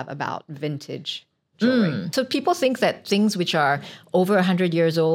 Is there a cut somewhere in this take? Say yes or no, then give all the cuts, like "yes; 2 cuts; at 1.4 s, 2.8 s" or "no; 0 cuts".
yes; 1 cut; at 2.0 s